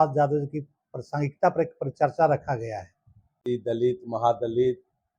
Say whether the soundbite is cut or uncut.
cut